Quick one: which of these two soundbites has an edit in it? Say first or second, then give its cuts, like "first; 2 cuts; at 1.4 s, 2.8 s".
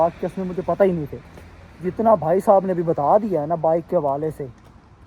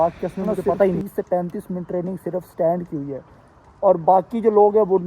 second; 1 cut; at 1.0 s